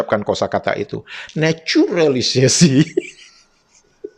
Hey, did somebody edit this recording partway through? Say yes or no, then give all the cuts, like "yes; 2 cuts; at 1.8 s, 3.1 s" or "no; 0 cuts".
yes; 1 cut; at 1.2 s